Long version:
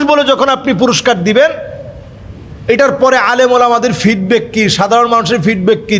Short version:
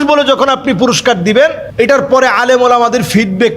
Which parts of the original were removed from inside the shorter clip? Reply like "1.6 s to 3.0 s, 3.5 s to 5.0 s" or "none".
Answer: 1.6 s to 2.5 s